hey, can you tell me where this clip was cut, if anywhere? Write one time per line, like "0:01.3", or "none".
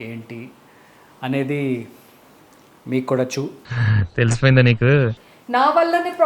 0:05.3